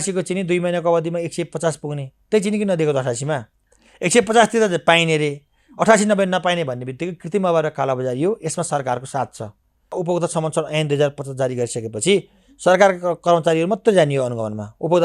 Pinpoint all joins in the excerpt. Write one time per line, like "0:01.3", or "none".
0:10.0